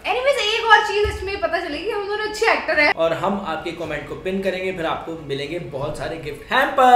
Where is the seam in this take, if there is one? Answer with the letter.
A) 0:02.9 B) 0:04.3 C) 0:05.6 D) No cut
A